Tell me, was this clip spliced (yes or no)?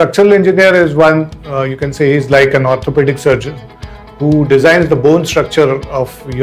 no